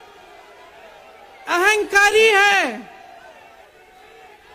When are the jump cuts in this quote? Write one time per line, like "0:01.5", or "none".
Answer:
none